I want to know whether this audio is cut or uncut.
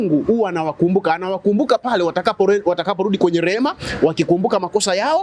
uncut